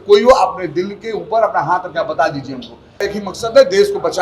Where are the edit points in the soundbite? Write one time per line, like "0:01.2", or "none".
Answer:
0:03.1